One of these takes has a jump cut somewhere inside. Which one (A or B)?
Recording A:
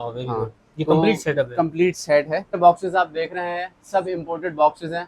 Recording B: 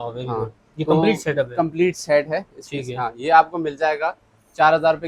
A